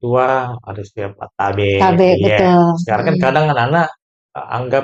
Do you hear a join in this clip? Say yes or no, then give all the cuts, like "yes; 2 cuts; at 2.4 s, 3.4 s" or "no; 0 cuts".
no; 0 cuts